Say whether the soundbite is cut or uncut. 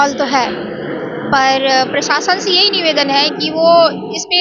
uncut